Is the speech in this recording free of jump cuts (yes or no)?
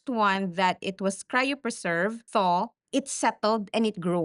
no